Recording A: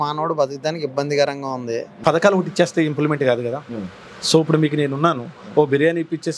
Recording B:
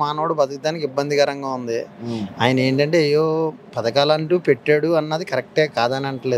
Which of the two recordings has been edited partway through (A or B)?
A